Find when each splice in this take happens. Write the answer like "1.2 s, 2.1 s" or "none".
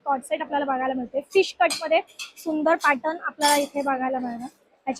none

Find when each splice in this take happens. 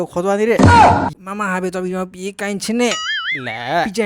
1.1 s

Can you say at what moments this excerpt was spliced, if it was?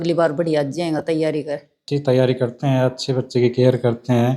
1.9 s

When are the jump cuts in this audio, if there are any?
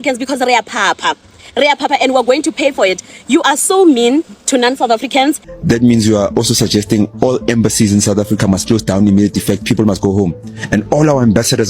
5.5 s

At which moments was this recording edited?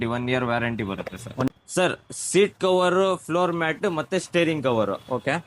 1.5 s

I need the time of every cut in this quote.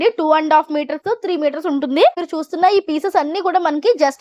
2.3 s

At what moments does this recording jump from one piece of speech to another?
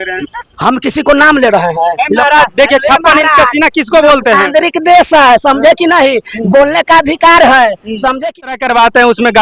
8.5 s

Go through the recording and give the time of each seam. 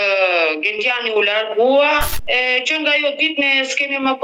2.1 s

